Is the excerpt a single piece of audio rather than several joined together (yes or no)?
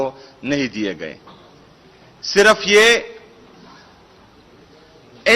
yes